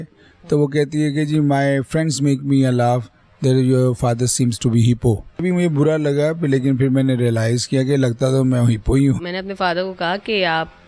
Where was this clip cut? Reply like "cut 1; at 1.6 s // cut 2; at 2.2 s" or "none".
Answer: cut 1; at 5.4 s // cut 2; at 9.2 s